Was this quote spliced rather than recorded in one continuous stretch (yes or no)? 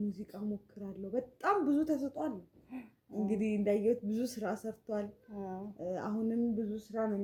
no